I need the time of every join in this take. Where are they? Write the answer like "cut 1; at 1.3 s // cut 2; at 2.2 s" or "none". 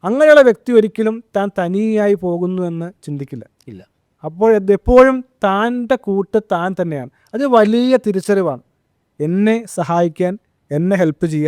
none